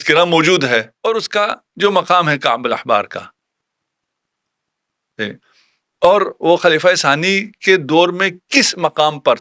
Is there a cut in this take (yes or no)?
yes